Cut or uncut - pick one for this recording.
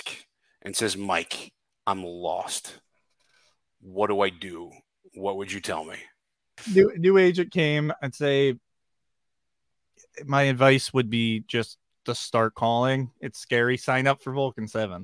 uncut